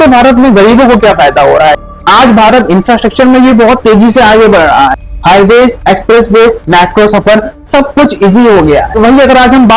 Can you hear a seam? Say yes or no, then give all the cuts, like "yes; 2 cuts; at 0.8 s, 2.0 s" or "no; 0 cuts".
yes; 3 cuts; at 1.8 s, 5.1 s, 8.9 s